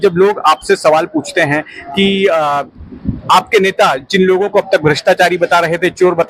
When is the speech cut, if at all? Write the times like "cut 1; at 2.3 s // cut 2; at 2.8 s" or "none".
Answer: none